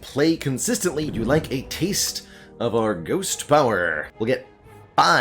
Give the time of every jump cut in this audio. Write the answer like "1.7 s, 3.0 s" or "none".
1.1 s, 4.0 s